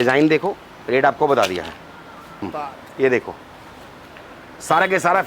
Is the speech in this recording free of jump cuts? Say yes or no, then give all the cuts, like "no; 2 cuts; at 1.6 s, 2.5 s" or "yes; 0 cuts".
no; 1 cut; at 2.5 s